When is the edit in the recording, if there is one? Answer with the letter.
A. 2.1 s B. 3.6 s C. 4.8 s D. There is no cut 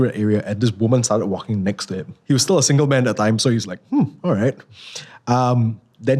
A